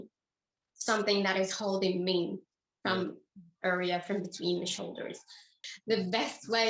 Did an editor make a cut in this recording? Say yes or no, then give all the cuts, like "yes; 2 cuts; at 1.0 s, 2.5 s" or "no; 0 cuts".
yes; 1 cut; at 5.6 s